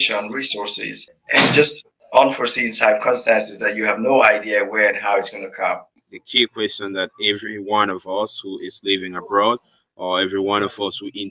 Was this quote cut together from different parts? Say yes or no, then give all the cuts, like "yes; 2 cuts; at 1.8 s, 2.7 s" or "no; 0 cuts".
yes; 1 cut; at 6.0 s